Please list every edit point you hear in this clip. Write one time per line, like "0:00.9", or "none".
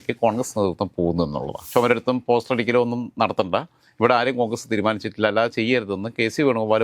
0:01.6